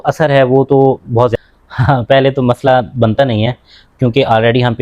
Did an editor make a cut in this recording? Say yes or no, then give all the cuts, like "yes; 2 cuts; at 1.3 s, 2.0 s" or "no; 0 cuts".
yes; 1 cut; at 1.3 s